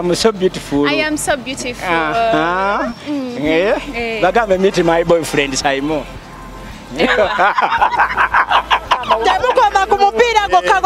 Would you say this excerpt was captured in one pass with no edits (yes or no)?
no